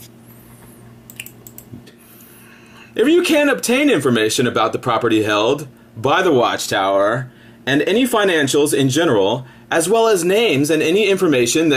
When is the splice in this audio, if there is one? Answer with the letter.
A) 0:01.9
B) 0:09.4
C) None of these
C